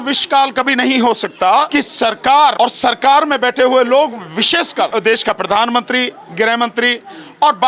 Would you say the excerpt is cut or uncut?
cut